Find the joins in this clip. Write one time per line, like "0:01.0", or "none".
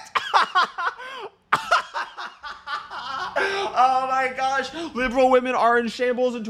none